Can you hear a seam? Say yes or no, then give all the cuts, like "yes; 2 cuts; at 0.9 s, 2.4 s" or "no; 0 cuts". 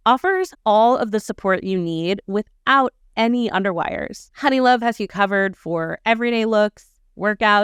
no; 0 cuts